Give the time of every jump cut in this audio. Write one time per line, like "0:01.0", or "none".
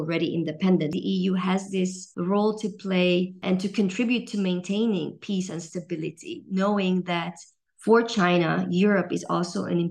0:01.0
0:02.0
0:03.4